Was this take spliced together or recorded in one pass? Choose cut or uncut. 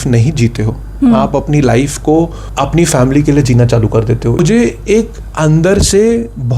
cut